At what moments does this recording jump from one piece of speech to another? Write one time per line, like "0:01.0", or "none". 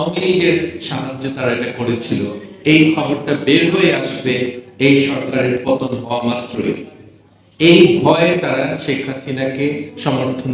none